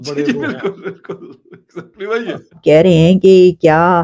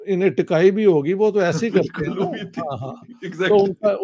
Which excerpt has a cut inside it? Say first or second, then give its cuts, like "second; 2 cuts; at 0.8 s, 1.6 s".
first; 1 cut; at 2.6 s